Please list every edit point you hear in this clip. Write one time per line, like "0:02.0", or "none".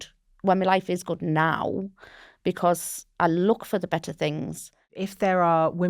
0:03.0
0:05.0